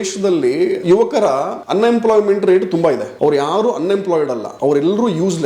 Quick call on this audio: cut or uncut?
cut